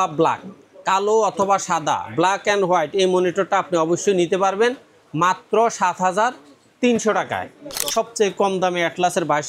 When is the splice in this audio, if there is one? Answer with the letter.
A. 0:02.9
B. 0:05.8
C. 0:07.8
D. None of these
C